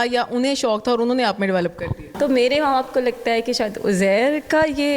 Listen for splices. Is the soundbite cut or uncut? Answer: cut